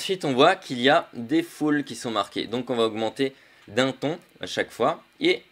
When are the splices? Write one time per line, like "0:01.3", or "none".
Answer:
0:03.5